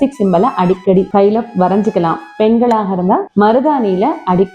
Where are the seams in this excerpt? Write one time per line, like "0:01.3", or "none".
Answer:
0:01.1
0:03.3